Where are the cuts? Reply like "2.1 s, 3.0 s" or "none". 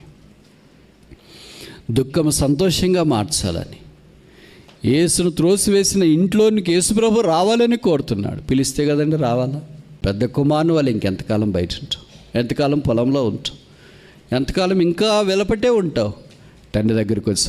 10.0 s